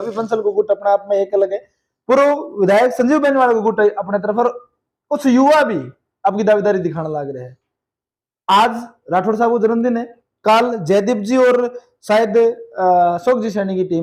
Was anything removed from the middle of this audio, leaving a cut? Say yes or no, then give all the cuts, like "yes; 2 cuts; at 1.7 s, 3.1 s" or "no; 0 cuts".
no; 0 cuts